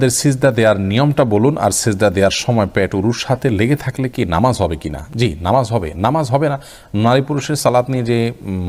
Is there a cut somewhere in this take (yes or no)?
no